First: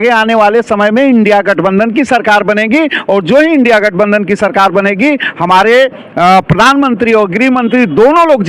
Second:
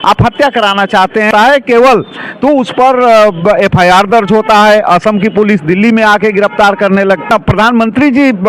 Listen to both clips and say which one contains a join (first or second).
second